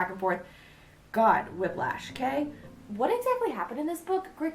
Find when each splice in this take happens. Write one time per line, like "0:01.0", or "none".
0:02.7